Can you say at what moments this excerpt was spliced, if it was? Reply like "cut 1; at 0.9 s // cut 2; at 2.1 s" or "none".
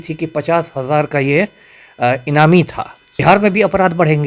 cut 1; at 3.1 s